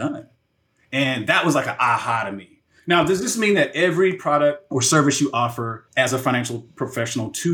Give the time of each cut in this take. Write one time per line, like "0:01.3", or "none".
0:04.6
0:05.7